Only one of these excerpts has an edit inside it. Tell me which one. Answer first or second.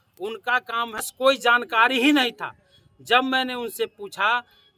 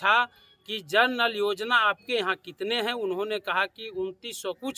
first